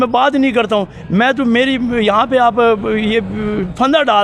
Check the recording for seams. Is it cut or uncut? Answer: uncut